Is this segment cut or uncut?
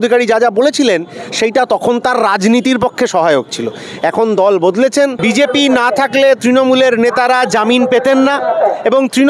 cut